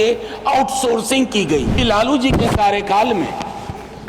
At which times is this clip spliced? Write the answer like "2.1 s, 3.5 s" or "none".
1.8 s